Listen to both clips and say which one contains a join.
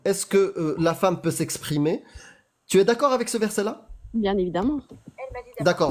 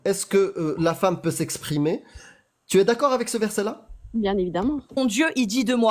second; 1 cut; at 4.9 s

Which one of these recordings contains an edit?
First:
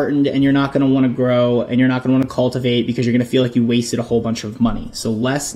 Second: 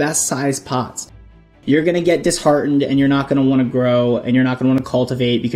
second; 1 cut; at 1.4 s

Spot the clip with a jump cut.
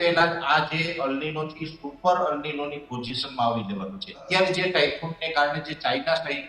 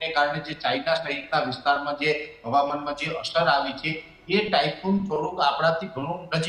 first; 1 cut; at 4.1 s

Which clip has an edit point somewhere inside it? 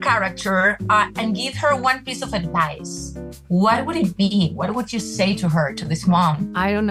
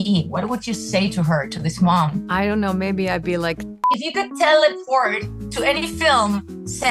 second; 1 cut; at 3.8 s

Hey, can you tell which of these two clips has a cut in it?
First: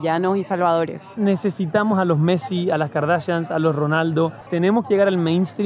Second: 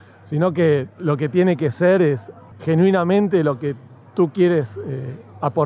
first; 2 cuts; at 1.1 s, 4.4 s

